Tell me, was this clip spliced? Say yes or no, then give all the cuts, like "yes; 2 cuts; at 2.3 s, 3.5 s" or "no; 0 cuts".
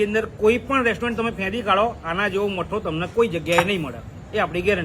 no; 0 cuts